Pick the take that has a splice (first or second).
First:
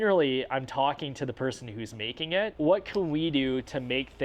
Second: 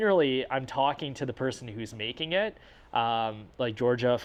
first